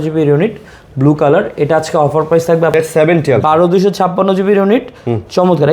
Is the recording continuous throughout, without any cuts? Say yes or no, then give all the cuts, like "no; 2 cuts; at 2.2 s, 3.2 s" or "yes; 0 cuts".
no; 1 cut; at 2.7 s